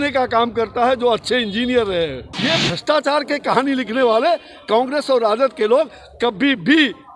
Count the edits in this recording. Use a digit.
1